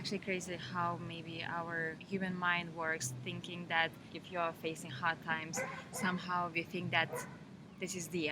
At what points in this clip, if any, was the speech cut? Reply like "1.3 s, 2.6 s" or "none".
4.0 s